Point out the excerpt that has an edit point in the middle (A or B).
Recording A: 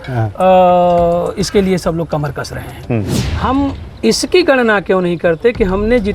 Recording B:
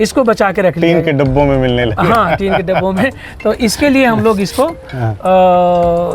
A